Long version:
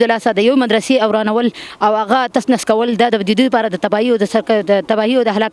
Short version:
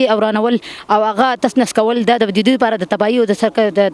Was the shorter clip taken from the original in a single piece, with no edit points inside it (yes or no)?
yes